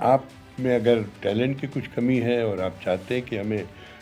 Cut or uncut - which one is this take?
uncut